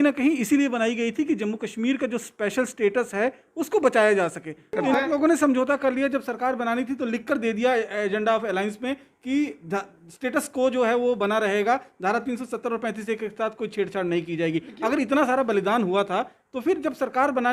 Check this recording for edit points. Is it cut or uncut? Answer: cut